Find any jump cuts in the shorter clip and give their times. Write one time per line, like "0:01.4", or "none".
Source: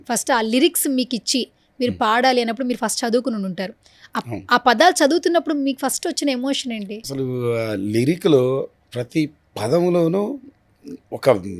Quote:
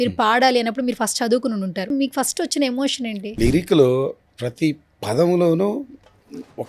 0:01.9
0:03.4